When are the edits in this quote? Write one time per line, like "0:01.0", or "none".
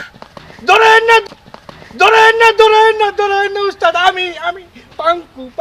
none